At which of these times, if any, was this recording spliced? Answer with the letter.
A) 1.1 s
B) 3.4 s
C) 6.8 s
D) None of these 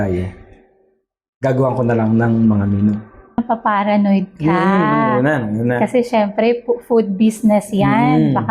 B